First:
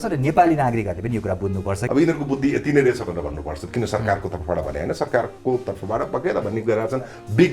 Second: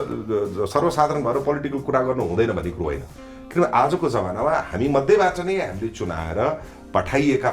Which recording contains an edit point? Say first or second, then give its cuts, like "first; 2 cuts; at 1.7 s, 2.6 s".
first; 1 cut; at 1.8 s